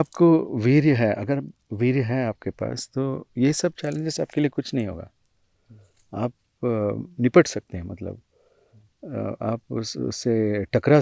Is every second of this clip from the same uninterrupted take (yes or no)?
yes